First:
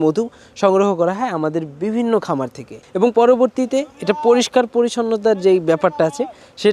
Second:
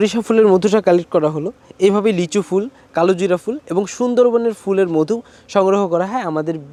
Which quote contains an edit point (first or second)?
first